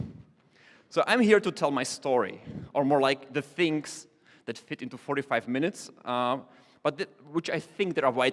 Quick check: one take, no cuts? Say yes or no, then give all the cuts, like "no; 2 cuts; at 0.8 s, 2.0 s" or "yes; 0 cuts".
yes; 0 cuts